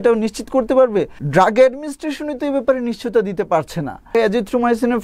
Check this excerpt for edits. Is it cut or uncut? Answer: cut